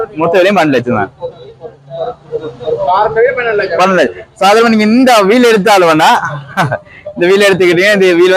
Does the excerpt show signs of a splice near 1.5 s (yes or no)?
no